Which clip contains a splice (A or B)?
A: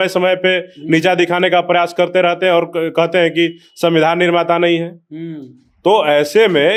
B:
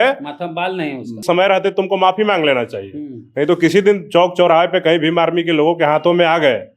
B